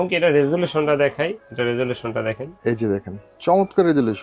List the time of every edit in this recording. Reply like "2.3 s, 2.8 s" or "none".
1.4 s